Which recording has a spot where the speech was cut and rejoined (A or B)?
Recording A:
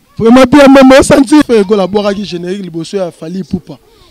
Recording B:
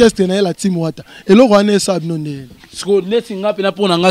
A